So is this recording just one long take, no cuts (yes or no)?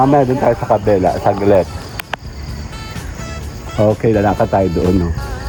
yes